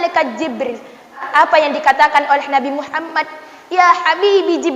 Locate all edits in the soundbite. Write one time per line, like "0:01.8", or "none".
0:01.2